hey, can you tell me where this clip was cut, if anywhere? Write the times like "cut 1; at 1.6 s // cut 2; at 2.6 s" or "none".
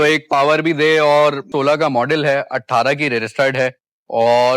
cut 1; at 1.5 s